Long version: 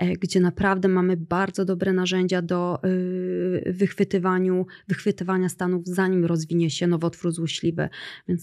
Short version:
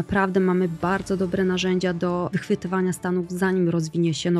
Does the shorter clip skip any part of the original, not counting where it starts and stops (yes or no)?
yes